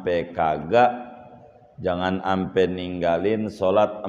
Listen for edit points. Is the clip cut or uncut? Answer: uncut